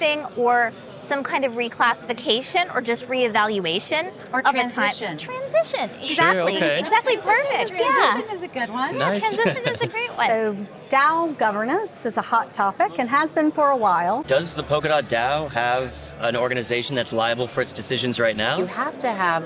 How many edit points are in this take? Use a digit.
3